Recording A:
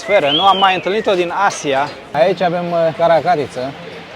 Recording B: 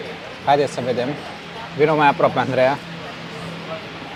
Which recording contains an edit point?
A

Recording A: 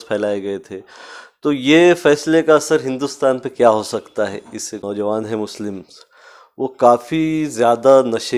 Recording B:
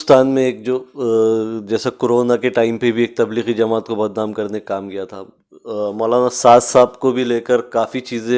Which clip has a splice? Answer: A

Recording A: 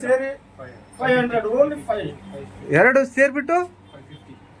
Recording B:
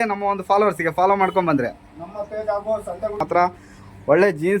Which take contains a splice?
B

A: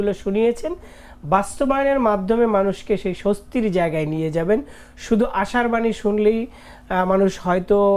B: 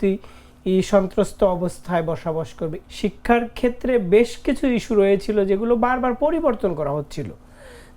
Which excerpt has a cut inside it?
B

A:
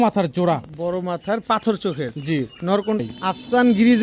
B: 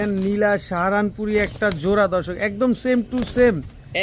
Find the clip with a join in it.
A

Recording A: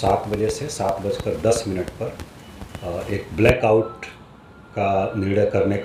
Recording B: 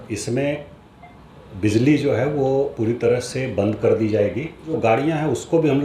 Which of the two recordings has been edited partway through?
B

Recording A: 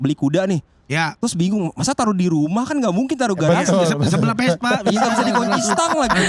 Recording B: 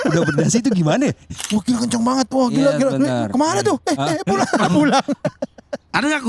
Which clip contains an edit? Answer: B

